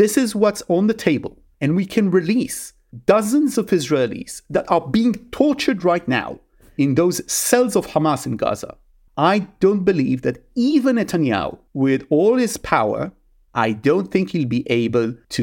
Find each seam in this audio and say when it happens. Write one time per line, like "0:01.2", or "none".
0:13.4